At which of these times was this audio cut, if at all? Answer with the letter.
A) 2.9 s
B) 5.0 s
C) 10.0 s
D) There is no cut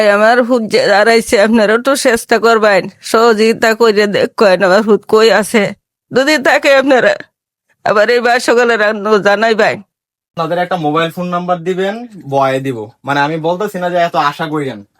C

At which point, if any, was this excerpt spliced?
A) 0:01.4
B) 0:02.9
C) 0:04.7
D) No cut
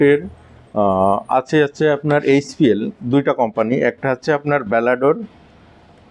D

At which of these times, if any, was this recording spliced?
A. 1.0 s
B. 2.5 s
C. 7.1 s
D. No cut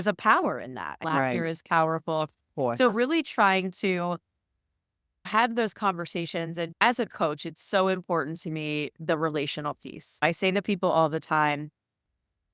A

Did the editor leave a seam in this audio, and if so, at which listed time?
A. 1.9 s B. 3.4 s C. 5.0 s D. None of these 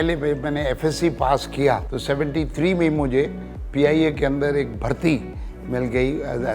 A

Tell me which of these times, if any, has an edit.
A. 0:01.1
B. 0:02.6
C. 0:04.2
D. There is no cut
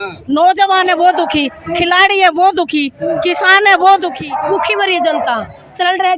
C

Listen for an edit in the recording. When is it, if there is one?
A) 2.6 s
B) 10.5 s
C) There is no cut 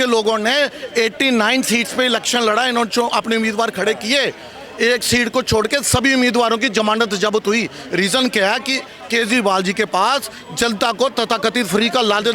C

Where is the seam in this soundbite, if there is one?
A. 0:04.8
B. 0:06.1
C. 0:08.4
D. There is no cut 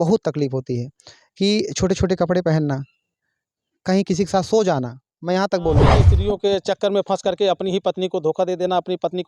B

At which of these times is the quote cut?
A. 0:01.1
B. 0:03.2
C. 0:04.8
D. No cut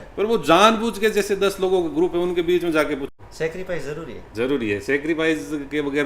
B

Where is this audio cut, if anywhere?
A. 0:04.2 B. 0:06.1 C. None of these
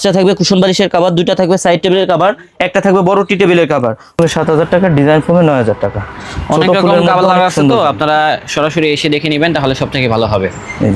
A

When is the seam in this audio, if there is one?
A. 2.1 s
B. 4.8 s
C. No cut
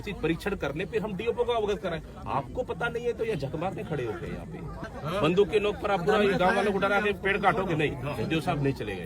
B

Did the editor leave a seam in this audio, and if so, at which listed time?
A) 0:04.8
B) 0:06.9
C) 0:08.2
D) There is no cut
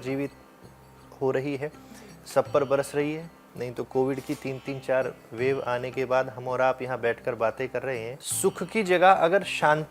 C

